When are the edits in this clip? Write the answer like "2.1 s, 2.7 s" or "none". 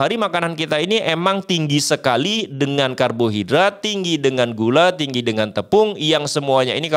none